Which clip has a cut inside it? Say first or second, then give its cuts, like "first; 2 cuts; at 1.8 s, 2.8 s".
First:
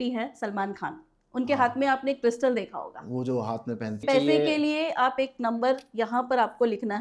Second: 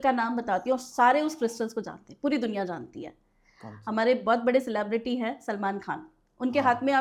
first; 1 cut; at 4.0 s